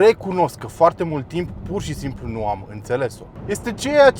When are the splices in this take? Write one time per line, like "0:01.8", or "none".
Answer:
0:03.3

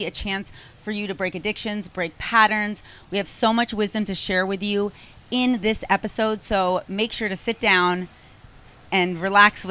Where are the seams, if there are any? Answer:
none

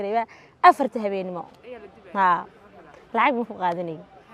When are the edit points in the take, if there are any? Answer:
none

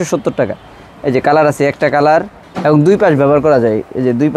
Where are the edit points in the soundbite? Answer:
0:02.4

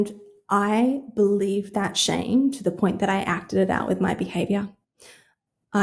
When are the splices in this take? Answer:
none

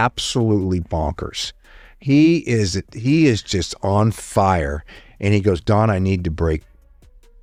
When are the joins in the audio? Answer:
none

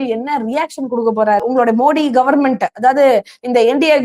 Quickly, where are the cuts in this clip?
0:01.4

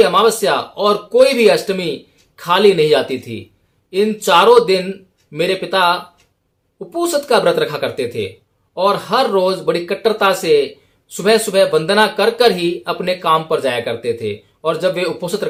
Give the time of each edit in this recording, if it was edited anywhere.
none

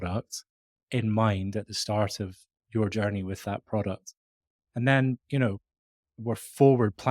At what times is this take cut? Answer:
0:06.1

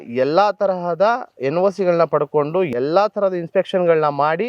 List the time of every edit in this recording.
0:02.7

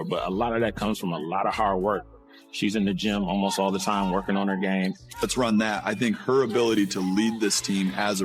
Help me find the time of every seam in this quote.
0:05.2

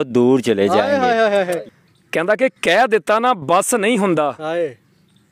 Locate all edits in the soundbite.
0:01.6

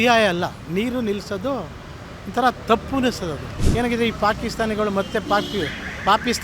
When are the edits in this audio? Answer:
0:03.5

